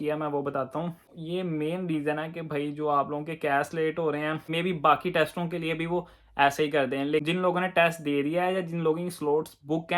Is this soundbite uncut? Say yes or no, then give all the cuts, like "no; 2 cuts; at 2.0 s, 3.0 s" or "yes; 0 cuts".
no; 3 cuts; at 1.2 s, 4.5 s, 7.2 s